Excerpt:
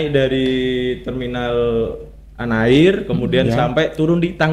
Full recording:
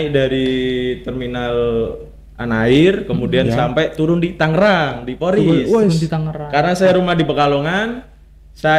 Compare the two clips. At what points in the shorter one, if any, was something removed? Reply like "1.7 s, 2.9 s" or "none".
none